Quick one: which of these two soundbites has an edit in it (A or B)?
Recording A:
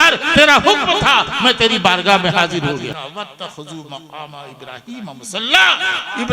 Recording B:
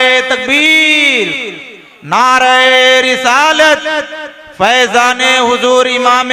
A